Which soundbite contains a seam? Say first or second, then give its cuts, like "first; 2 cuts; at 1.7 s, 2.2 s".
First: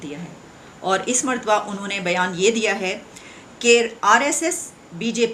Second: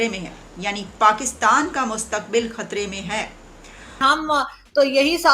second; 1 cut; at 4.0 s